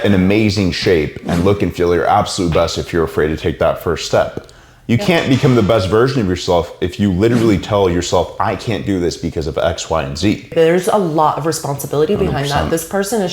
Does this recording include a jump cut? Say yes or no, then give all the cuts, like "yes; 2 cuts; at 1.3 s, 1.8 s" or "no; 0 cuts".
yes; 1 cut; at 10.5 s